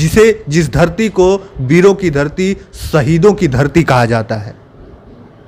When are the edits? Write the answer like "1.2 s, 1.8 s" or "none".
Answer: none